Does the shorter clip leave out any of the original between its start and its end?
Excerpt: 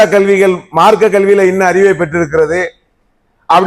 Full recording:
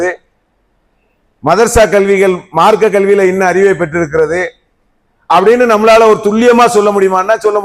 no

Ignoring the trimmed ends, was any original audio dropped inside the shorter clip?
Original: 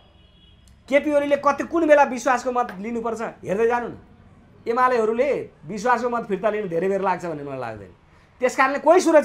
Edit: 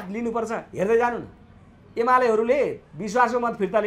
no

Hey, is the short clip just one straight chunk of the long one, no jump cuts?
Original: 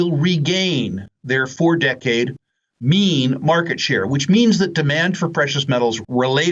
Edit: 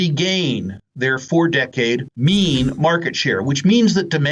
no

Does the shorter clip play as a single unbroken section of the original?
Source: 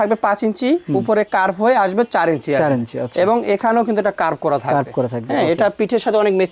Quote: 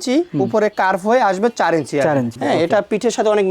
no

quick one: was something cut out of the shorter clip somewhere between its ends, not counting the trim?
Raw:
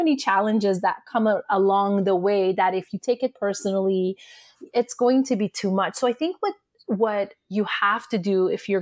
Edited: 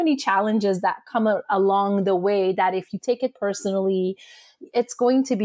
no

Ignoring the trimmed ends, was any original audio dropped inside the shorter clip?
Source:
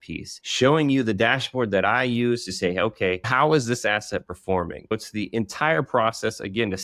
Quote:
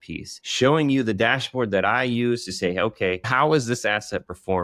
no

